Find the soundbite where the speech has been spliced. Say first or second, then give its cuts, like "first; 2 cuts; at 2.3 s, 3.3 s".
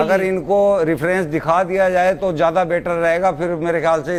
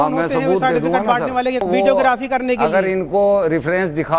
second; 1 cut; at 1.6 s